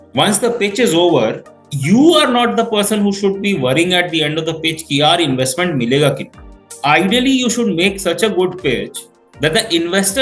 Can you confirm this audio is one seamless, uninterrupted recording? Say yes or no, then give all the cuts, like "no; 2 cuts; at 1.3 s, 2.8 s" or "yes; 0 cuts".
yes; 0 cuts